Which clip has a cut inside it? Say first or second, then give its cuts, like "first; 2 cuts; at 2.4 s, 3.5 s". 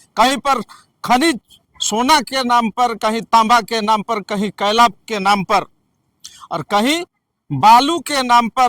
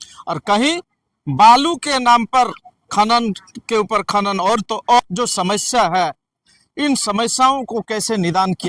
second; 1 cut; at 5.0 s